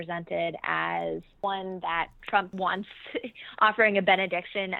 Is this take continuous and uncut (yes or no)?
no